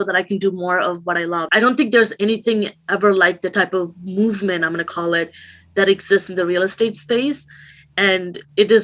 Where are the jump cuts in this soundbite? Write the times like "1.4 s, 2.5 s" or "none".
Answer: 1.5 s